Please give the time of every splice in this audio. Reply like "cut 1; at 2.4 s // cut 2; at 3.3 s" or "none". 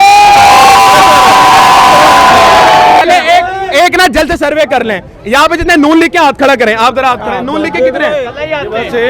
cut 1; at 3.0 s